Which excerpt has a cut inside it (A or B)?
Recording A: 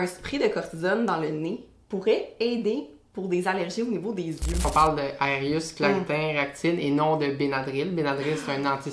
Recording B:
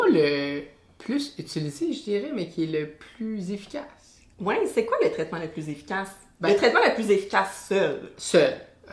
A